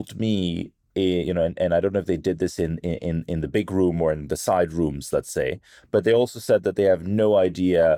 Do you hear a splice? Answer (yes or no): no